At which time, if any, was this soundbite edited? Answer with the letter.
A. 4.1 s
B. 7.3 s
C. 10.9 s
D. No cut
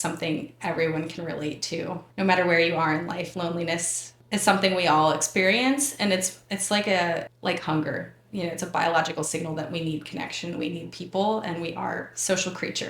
B